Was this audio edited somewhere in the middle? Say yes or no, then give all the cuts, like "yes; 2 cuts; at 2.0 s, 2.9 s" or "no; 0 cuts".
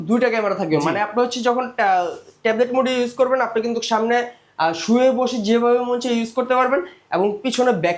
no; 0 cuts